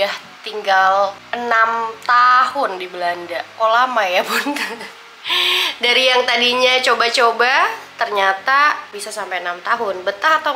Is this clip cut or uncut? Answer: uncut